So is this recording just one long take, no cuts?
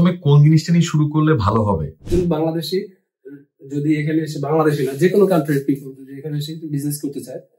no; 1 cut; at 2.0 s

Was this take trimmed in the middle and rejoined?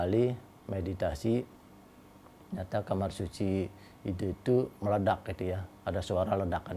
no; 0 cuts

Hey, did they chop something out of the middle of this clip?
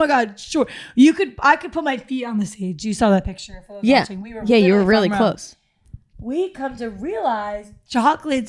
no; 0 cuts

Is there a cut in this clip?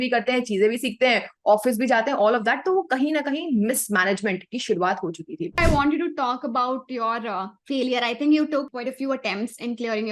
yes; 3 cuts; at 5.6 s, 7.5 s, 8.7 s

